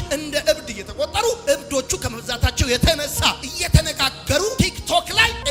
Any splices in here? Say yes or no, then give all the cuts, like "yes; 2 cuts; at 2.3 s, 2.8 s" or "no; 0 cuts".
no; 0 cuts